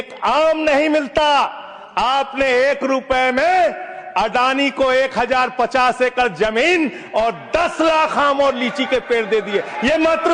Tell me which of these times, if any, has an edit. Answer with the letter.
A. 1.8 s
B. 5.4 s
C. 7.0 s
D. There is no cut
D